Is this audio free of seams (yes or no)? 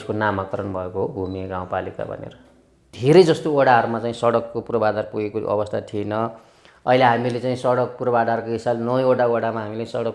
no